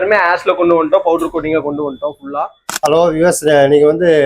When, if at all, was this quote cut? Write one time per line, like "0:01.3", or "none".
0:02.6